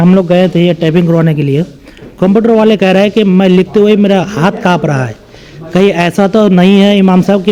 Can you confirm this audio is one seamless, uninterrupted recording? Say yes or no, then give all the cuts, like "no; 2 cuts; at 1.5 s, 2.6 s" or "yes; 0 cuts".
yes; 0 cuts